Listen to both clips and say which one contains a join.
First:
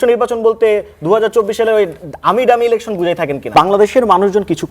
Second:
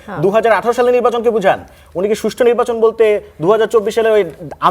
first; 1 cut; at 3.5 s

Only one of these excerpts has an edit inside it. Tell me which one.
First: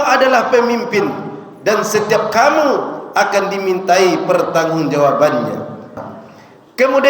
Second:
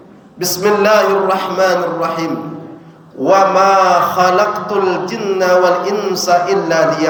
first; 1 cut; at 6.0 s

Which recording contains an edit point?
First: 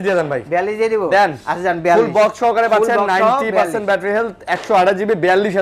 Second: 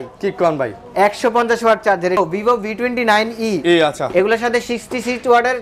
second; 1 cut; at 2.2 s

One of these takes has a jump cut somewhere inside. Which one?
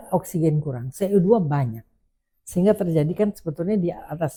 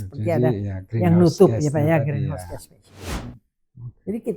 second; 1 cut; at 3.1 s

